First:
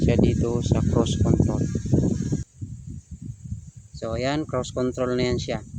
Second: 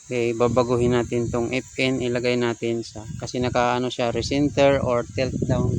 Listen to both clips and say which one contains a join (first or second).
first